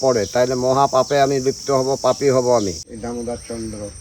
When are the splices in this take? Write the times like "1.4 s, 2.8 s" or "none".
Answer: 2.9 s